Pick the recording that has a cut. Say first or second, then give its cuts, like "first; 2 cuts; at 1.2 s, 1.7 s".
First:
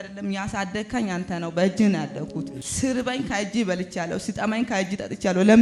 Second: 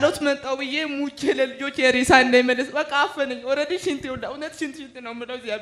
first; 1 cut; at 2.6 s